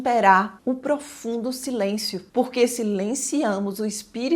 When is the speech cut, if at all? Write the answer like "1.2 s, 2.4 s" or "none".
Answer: none